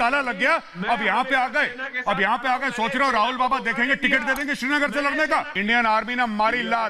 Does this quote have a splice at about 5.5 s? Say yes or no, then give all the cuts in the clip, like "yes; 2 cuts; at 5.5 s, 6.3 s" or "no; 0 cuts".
yes; 1 cut; at 5.5 s